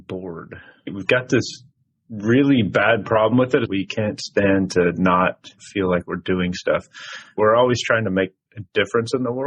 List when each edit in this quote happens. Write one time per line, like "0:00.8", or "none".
0:01.0
0:03.7
0:07.4